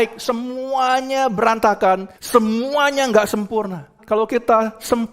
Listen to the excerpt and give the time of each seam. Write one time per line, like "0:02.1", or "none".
0:02.1
0:04.0